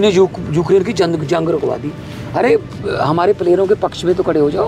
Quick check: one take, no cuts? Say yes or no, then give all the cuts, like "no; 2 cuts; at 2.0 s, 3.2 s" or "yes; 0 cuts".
yes; 0 cuts